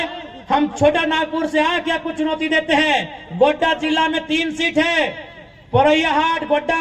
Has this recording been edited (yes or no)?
no